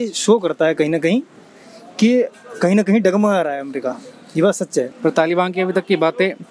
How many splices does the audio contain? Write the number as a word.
one